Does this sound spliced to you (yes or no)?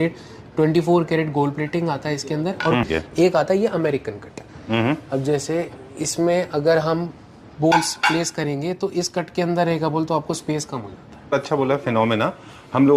yes